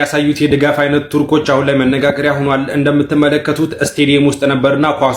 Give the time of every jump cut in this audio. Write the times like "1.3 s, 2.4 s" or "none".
none